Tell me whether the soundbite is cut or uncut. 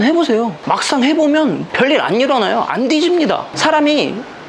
cut